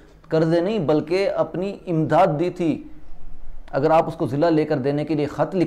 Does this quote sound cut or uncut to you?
uncut